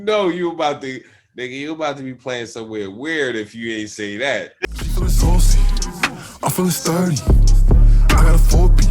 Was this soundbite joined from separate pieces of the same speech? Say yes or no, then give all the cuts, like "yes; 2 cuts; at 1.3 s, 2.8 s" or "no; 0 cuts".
yes; 1 cut; at 4.6 s